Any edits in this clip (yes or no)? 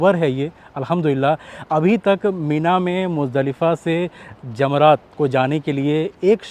no